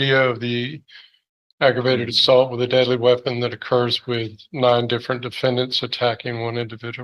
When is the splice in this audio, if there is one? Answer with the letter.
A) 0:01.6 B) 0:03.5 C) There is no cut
C